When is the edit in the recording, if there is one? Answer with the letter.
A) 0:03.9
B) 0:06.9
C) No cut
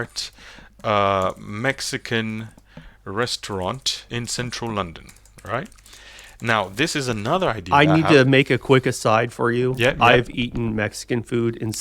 A